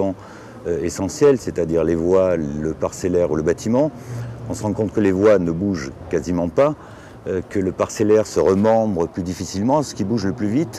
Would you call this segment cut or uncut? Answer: uncut